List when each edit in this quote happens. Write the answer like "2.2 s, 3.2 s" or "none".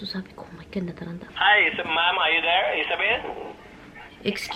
1.3 s